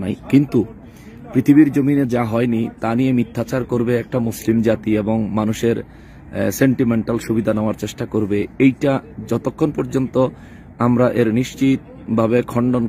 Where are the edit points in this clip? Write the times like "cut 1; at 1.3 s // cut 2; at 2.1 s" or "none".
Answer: none